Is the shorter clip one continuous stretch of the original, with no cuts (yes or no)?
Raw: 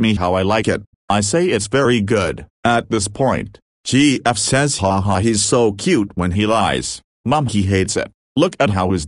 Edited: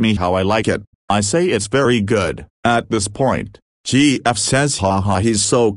yes